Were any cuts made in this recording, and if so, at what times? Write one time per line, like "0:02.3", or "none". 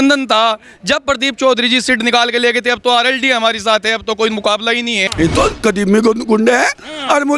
0:05.1